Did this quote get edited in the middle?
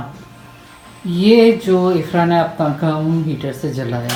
no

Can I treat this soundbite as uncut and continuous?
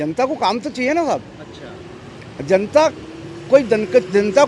yes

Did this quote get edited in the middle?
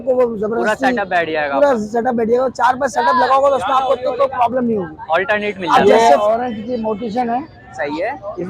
yes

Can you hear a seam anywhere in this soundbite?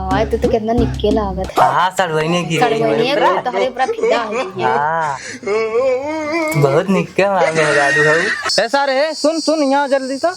yes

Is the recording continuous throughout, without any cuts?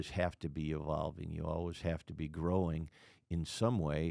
yes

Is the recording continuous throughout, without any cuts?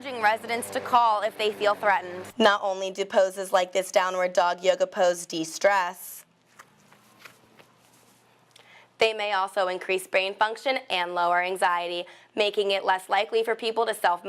no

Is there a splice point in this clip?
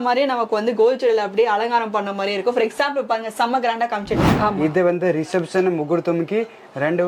yes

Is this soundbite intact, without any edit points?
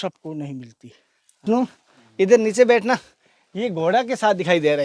no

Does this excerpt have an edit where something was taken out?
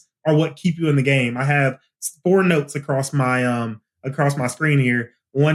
no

